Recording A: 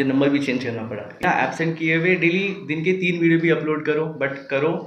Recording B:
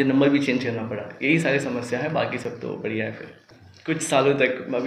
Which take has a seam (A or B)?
A